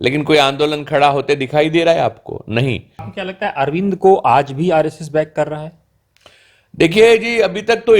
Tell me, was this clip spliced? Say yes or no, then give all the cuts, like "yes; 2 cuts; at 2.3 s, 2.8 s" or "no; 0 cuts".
yes; 1 cut; at 3.0 s